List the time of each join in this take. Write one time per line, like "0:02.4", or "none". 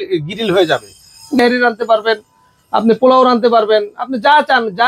0:01.4